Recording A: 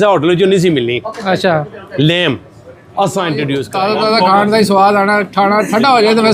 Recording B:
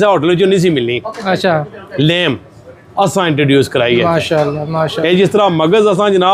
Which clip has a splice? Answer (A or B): A